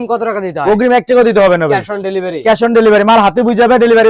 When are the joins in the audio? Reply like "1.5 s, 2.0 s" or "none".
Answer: none